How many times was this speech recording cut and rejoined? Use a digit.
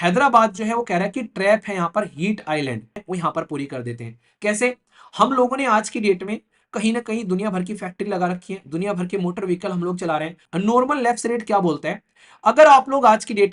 2